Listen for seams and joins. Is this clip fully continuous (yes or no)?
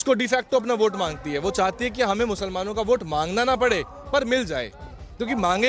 yes